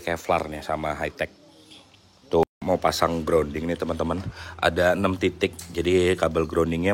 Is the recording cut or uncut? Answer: cut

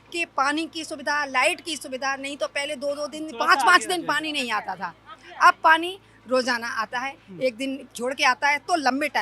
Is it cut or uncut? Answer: uncut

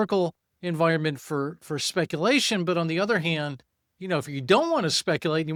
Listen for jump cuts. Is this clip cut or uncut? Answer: uncut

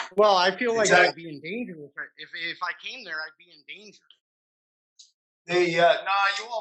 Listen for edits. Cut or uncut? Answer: uncut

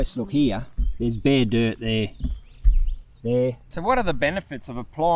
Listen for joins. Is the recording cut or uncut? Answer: cut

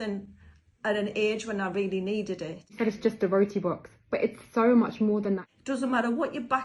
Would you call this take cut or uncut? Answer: cut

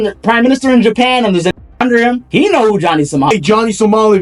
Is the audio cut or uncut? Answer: cut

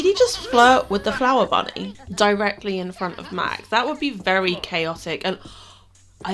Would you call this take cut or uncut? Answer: uncut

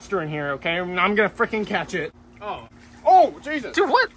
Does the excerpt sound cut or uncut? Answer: uncut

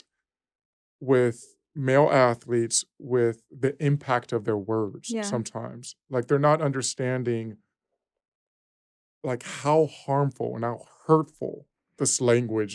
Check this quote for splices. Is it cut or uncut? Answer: uncut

